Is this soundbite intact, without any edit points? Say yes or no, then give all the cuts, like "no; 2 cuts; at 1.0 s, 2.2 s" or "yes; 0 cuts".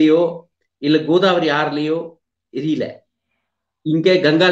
yes; 0 cuts